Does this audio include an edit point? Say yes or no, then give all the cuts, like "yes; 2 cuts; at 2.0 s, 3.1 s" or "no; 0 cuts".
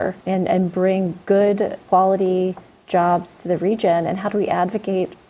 yes; 2 cuts; at 1.2 s, 1.8 s